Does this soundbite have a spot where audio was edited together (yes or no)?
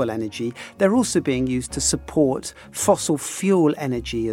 no